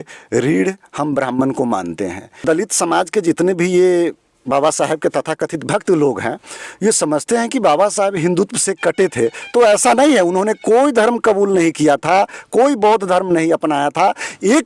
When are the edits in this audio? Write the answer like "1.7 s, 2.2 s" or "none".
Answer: 2.4 s